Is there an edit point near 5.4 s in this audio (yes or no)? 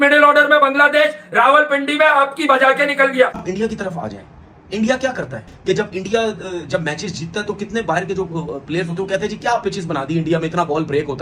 yes